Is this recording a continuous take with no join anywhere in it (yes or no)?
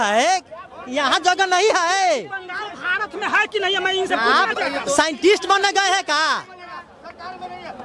yes